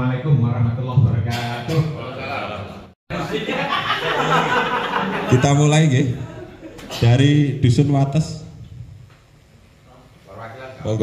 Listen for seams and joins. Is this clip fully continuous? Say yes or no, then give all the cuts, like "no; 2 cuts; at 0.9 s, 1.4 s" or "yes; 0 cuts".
no; 1 cut; at 3.0 s